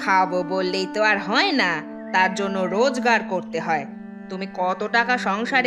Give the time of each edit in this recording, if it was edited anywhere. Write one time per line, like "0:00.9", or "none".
none

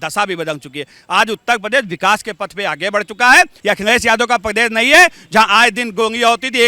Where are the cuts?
0:03.6

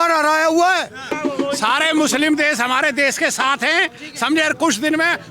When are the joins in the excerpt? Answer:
0:01.1

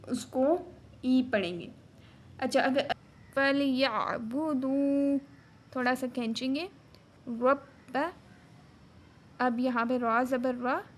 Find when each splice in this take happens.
0:02.9

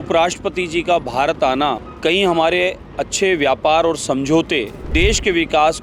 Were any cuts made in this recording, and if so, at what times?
0:01.9
0:04.8

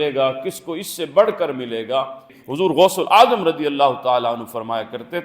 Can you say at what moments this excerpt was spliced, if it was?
0:02.4

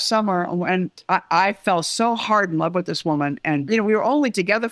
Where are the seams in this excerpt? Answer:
none

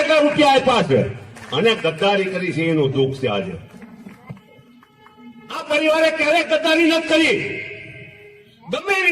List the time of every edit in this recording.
none

